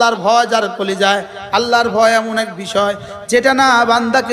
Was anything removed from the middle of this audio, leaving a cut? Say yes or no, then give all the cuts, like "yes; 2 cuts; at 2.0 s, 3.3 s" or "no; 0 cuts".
no; 0 cuts